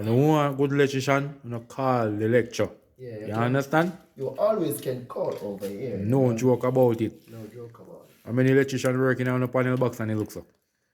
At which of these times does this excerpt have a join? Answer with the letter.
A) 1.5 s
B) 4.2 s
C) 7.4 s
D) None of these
D